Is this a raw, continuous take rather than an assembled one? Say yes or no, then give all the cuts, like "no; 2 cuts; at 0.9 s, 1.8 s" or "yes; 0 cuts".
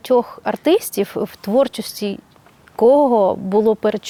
yes; 0 cuts